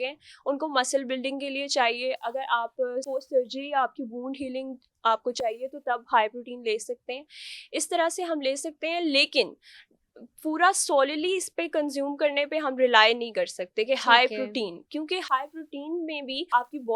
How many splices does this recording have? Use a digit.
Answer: 0